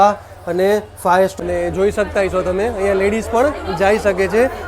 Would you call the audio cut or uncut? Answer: cut